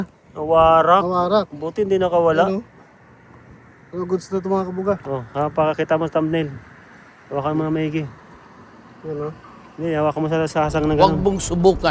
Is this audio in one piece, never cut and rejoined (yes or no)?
no